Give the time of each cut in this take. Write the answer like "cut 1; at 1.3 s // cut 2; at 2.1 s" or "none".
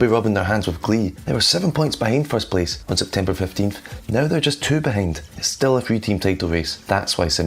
cut 1; at 1.2 s // cut 2; at 2.8 s // cut 3; at 5.3 s